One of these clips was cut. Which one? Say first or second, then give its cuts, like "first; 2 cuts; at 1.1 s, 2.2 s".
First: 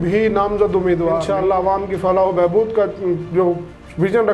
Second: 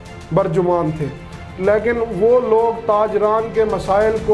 first; 1 cut; at 1.3 s